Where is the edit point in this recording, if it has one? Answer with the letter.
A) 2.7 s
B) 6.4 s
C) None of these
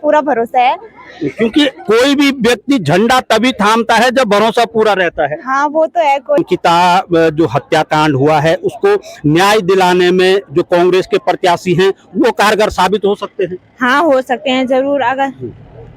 B